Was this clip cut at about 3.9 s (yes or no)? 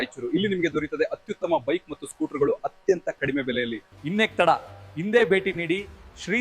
yes